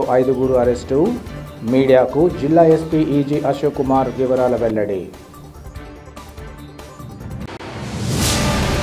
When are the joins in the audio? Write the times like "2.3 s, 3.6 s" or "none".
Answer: none